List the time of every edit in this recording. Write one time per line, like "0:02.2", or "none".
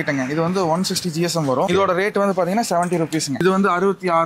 0:01.7
0:03.3